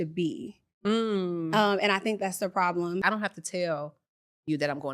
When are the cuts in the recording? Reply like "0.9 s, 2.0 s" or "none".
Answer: 3.0 s

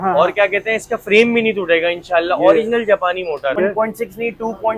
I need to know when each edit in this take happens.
3.6 s

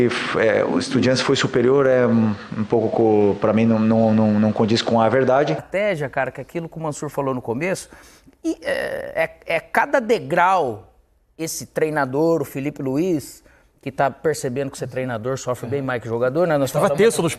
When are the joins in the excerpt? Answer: 5.7 s

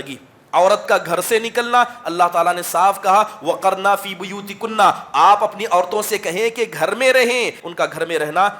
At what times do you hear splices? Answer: 7.6 s

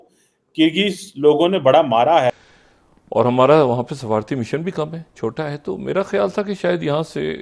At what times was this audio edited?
2.3 s

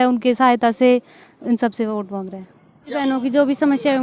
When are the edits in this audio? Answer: 3.0 s

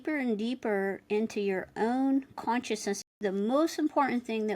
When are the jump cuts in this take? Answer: 3.1 s

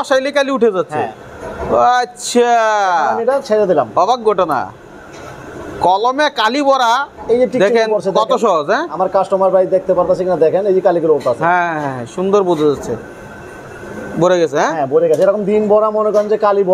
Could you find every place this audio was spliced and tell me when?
none

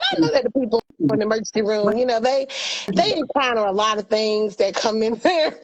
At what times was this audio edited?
none

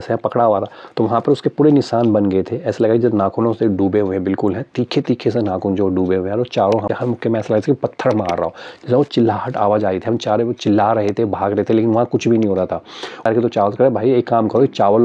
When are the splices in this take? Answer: 6.8 s, 13.2 s

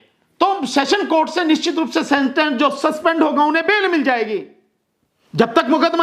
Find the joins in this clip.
none

